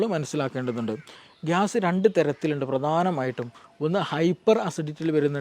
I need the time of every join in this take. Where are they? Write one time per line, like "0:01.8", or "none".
0:01.1